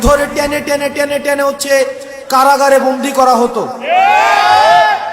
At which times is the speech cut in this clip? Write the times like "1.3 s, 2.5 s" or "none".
none